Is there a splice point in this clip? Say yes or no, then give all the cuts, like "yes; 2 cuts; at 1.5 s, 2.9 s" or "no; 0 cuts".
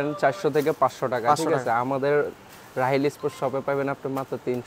no; 0 cuts